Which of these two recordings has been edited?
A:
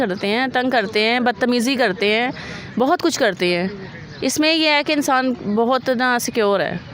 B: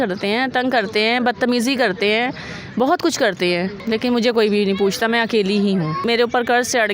B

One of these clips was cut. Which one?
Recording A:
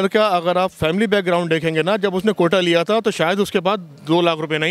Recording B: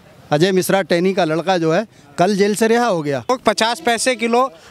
B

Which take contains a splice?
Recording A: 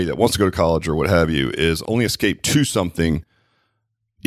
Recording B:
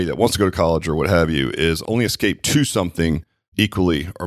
B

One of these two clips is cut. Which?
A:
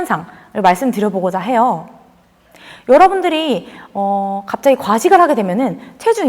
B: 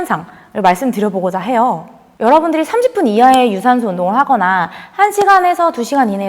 B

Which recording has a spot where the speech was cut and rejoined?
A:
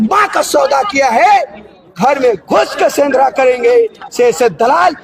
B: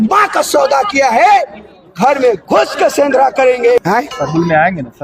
B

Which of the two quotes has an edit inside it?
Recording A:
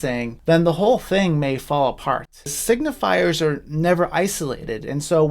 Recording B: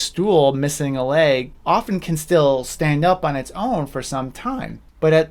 A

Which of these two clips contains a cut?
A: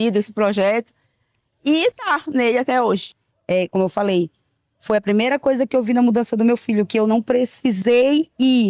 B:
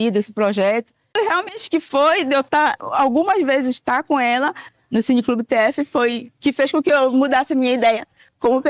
B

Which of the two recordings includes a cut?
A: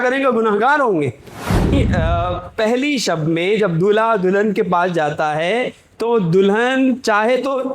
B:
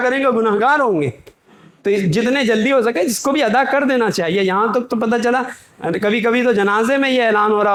A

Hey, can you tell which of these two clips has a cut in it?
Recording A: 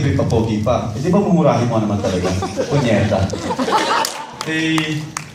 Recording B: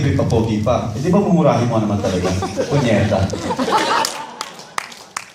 A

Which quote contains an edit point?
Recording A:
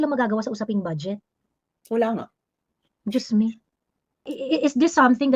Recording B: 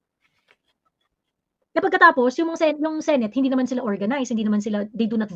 A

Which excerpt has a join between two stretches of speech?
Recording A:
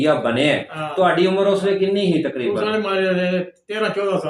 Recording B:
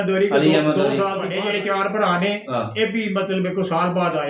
B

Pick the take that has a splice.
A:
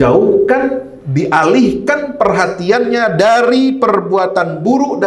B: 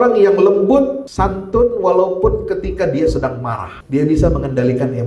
B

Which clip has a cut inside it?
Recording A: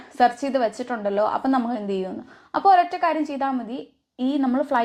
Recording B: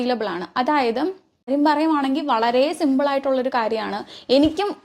B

